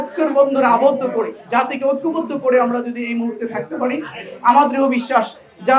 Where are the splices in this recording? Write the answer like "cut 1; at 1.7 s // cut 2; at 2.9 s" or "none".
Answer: none